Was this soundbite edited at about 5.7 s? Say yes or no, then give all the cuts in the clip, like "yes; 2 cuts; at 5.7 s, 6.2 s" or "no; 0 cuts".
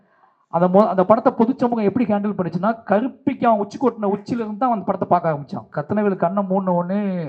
yes; 1 cut; at 5.7 s